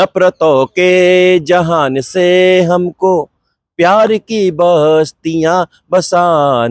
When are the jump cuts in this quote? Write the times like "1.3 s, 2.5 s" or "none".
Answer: none